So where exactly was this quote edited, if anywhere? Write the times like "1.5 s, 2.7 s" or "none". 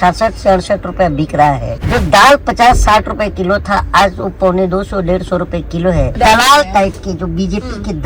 1.7 s, 6.2 s

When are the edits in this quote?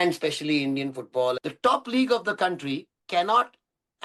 1.4 s, 2.9 s

